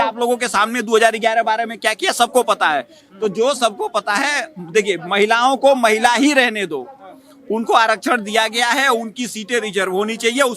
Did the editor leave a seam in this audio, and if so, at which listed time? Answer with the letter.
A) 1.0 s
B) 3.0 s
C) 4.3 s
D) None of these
D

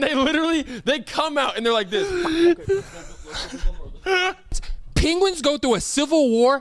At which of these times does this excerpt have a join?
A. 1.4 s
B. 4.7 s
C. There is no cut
B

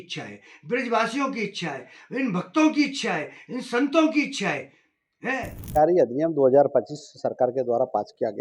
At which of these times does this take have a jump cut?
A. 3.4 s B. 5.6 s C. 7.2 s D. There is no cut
B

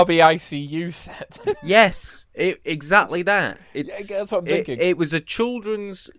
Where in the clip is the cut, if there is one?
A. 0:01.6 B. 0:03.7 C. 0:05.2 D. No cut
A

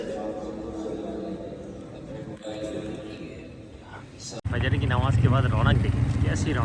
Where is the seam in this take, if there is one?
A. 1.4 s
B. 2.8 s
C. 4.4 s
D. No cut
C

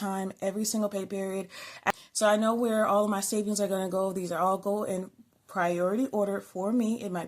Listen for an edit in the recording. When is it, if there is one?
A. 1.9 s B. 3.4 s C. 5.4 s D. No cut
A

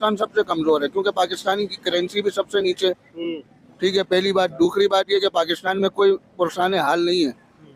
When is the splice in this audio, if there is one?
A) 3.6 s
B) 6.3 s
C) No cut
C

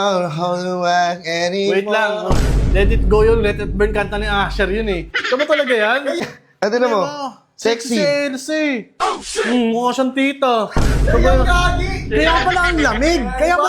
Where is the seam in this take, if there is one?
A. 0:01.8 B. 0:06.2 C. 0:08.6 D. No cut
B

